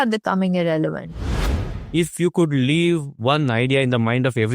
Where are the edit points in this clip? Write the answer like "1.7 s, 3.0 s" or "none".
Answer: 1.2 s